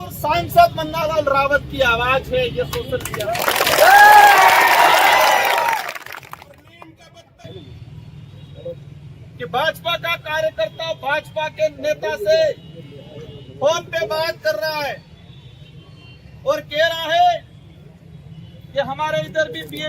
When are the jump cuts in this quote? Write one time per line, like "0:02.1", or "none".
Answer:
0:07.4